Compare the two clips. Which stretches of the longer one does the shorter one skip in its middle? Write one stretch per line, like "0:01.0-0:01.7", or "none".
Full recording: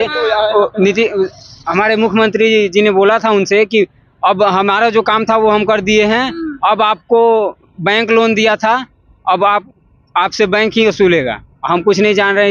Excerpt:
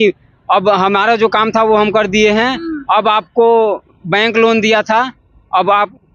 none